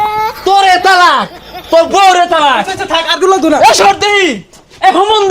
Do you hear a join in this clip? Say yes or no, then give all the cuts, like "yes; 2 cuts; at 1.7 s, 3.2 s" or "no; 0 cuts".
no; 0 cuts